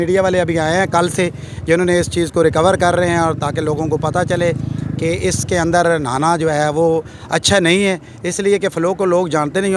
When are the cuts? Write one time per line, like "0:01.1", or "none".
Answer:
none